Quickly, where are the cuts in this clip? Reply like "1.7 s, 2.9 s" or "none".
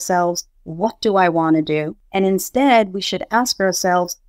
2.0 s